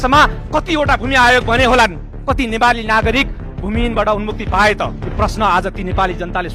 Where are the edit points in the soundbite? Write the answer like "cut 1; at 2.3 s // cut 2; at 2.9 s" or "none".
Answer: none